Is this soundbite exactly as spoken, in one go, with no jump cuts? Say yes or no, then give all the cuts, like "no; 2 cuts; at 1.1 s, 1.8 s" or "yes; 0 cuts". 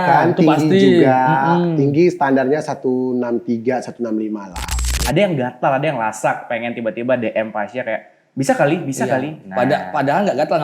no; 1 cut; at 4.7 s